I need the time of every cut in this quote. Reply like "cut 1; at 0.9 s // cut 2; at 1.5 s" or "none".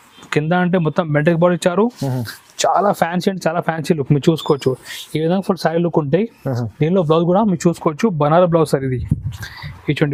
none